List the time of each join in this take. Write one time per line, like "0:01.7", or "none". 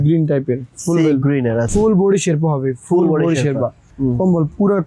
0:01.7
0:03.8